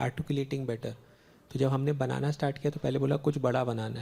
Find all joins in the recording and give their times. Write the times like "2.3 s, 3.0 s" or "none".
none